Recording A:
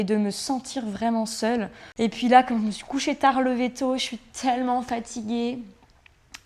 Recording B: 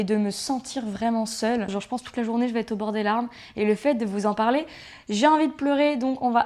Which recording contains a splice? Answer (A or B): B